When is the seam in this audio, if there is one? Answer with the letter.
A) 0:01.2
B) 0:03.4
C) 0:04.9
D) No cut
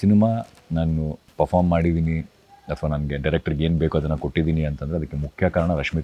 A